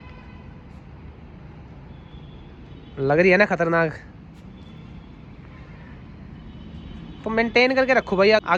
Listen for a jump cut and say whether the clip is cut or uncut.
uncut